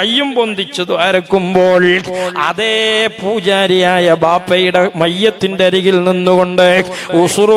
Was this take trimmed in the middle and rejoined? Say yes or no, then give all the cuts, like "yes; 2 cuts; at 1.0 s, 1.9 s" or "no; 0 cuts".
no; 0 cuts